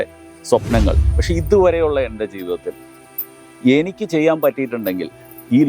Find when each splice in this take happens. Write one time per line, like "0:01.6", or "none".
0:01.1